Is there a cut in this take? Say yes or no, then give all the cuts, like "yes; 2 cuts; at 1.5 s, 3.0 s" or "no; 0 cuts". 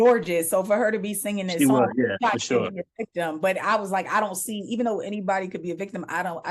no; 0 cuts